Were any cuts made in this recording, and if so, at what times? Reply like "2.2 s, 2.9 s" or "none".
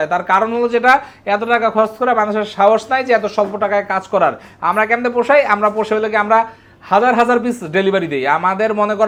none